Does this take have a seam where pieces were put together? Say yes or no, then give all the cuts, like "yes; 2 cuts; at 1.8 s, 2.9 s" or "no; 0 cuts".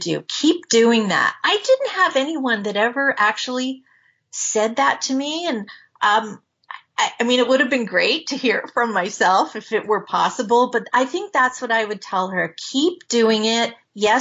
no; 0 cuts